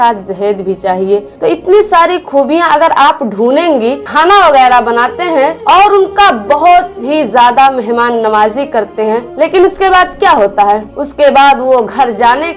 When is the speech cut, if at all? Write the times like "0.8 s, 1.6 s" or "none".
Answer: 4.1 s

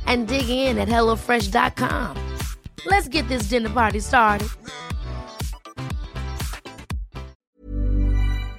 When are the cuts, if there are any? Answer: 7.6 s

